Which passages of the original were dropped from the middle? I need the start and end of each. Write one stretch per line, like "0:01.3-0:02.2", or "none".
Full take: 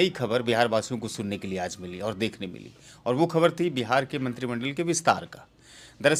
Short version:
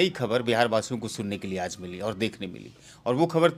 none